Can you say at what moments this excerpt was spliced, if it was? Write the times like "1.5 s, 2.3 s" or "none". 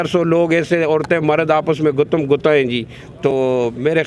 none